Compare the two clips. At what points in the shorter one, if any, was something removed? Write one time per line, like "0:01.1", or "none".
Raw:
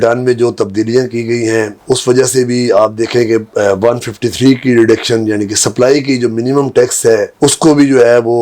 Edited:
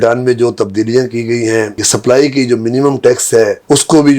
0:01.8